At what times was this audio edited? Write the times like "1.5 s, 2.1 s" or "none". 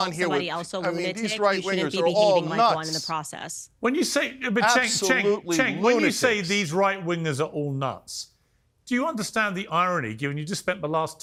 none